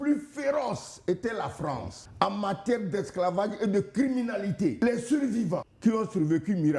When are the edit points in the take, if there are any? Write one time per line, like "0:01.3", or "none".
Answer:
0:02.0
0:04.8
0:05.7